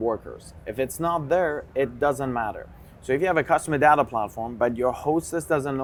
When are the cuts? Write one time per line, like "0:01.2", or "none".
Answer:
none